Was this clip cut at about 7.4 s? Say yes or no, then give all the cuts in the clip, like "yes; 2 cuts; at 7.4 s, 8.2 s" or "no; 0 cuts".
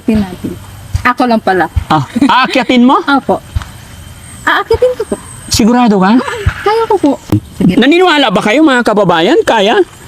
yes; 1 cut; at 7.4 s